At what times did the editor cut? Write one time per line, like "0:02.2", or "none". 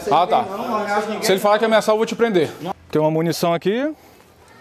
0:02.7